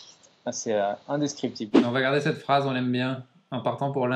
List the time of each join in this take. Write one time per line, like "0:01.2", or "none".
0:01.8